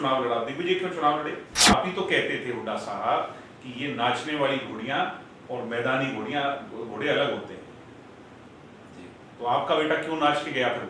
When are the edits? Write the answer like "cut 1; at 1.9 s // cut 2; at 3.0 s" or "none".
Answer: cut 1; at 1.5 s